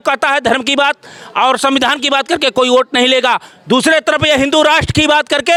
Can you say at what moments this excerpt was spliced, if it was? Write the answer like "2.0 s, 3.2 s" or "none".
none